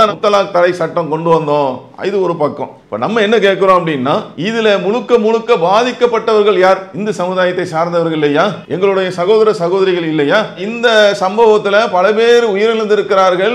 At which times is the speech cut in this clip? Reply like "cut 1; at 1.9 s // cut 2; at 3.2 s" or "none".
cut 1; at 8.6 s